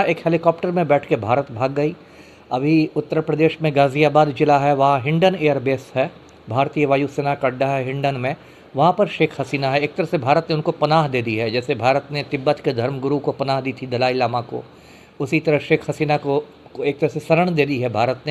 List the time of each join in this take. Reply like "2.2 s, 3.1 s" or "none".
none